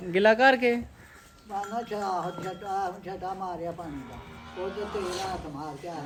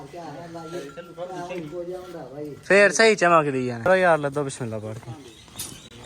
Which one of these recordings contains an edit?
second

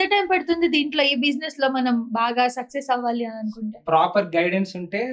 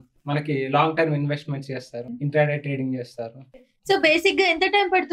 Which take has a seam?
second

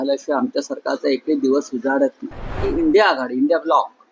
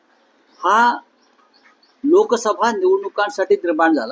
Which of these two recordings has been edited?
first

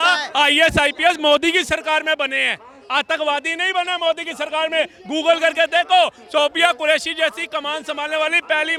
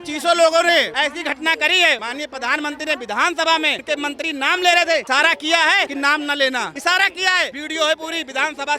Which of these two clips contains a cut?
second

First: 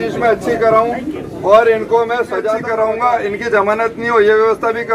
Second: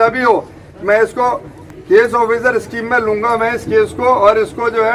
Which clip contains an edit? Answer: first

